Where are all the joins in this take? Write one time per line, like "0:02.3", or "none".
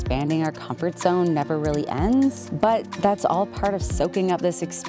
0:02.5